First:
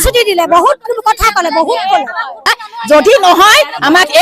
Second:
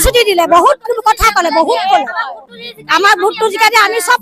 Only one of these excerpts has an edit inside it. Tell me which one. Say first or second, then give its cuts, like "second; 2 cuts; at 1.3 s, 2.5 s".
first; 1 cut; at 2.7 s